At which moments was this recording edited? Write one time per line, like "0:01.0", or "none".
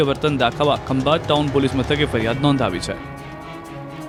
none